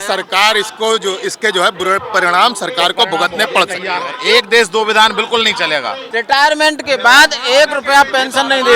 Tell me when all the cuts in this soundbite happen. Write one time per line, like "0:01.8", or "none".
0:04.1
0:06.1

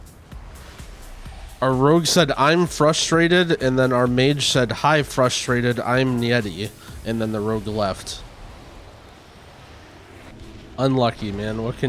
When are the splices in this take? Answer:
0:10.3

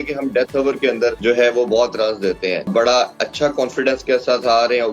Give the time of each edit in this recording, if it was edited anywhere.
0:01.2
0:02.7

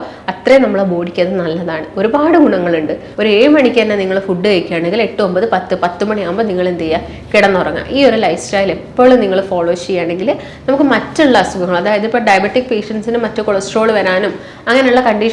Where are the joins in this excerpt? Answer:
0:03.1

